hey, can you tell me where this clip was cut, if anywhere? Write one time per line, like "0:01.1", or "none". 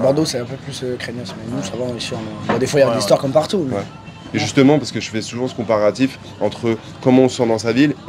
none